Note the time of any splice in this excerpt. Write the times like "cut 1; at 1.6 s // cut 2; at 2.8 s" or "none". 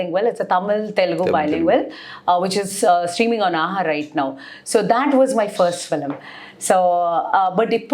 none